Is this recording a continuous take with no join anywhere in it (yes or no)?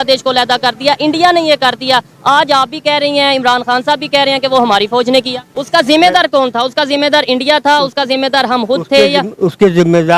yes